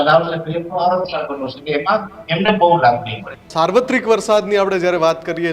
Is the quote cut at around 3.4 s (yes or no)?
yes